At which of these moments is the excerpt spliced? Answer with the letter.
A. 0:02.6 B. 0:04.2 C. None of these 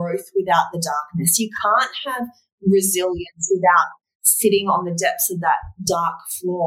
C